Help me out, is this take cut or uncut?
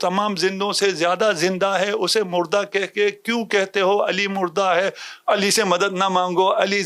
uncut